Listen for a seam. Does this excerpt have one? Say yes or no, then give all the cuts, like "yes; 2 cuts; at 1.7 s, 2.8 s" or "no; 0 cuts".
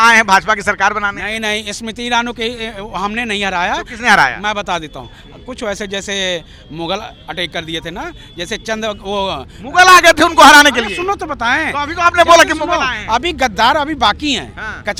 no; 0 cuts